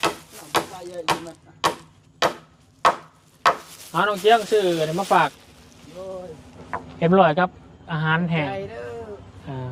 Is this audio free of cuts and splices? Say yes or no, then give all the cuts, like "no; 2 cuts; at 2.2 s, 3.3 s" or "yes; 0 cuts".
yes; 0 cuts